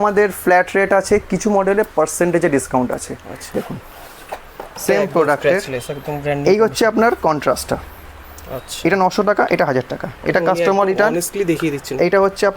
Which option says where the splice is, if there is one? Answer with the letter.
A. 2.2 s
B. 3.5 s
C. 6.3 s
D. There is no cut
B